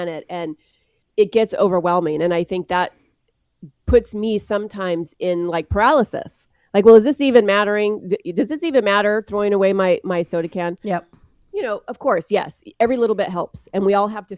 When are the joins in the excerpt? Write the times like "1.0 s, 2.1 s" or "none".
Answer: none